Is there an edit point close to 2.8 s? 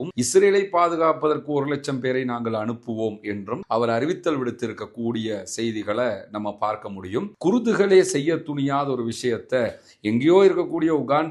no; 1 cut; at 7.3 s

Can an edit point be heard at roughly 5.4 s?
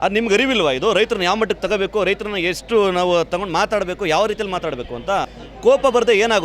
yes; 1 cut; at 5.4 s

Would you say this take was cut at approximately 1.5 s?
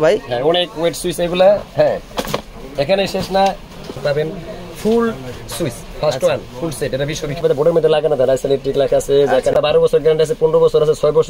no; 3 cuts; at 4.0 s, 7.4 s, 9.6 s

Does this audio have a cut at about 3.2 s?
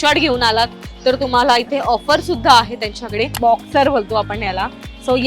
yes; 1 cut; at 3.2 s

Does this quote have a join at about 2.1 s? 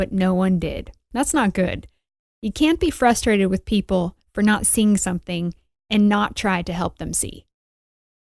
yes; 1 cut; at 2.1 s

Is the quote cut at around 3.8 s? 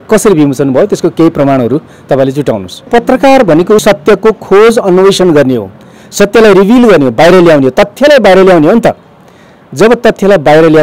yes; 2 cuts; at 2.9 s, 3.8 s

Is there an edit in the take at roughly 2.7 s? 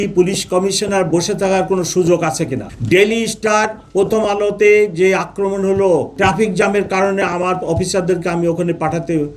yes; 2 cuts; at 2.7 s, 6.1 s

